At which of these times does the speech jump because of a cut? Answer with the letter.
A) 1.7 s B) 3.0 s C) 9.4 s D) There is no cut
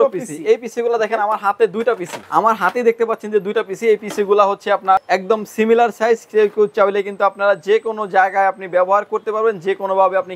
D